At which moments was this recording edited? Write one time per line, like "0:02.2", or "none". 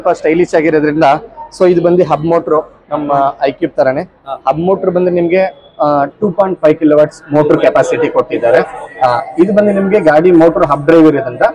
none